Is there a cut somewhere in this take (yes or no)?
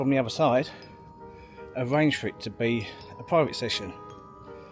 no